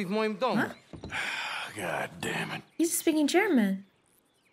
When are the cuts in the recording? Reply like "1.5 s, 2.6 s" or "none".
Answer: none